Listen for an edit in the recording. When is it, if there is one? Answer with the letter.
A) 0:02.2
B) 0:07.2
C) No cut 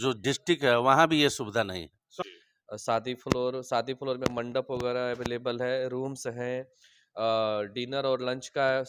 A